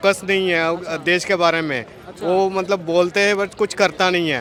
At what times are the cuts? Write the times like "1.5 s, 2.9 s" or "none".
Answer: none

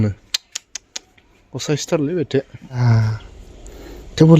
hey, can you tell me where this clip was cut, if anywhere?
2.8 s

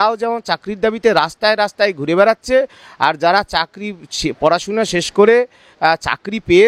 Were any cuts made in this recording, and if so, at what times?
none

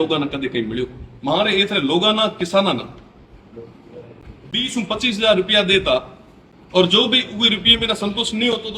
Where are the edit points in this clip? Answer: 1.1 s

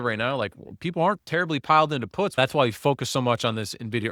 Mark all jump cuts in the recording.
2.4 s

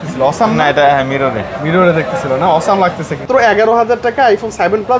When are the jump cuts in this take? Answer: 3.2 s

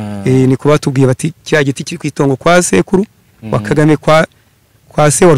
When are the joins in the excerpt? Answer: none

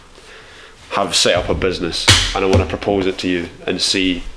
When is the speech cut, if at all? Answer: none

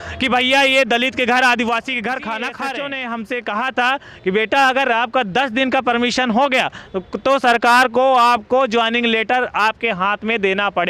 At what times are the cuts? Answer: 2.6 s

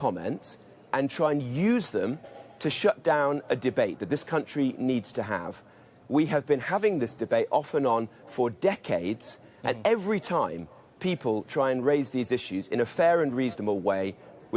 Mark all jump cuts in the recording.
none

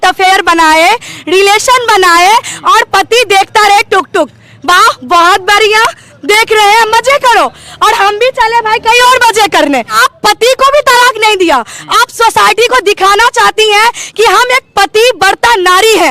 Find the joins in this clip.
10.0 s

